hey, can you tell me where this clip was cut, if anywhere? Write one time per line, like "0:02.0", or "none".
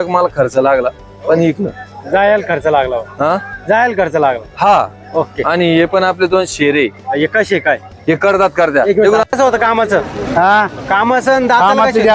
0:09.4